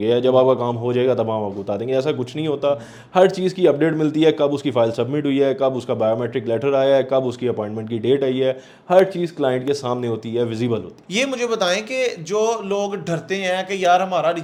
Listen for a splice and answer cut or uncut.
uncut